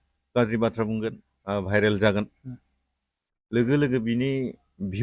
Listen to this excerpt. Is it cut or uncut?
cut